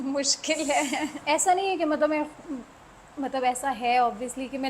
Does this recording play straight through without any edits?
no; 1 cut; at 1.2 s

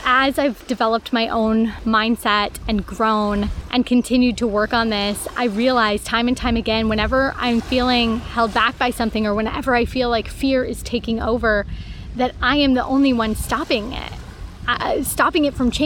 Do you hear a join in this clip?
no; 0 cuts

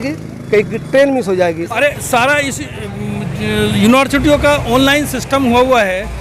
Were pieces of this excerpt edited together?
yes; 1 cut; at 1.7 s

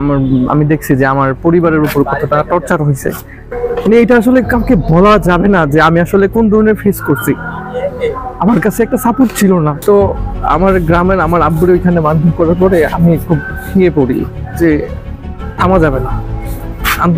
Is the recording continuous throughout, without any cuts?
no; 2 cuts; at 3.5 s, 9.8 s

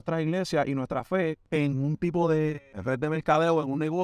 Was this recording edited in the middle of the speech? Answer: yes; 2 cuts; at 1.4 s, 2.7 s

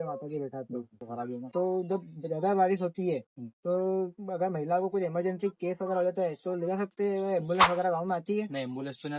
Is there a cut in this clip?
yes; 1 cut; at 1.0 s

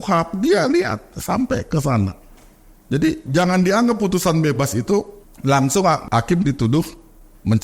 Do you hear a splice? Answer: yes; 2 cuts; at 5.2 s, 6.0 s

